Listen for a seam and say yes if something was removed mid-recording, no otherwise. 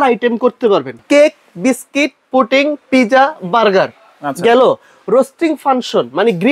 yes